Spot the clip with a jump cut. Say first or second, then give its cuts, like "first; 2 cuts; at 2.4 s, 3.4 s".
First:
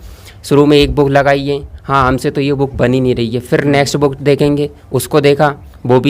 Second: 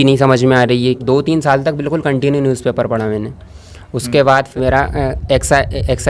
second; 2 cuts; at 1.0 s, 4.6 s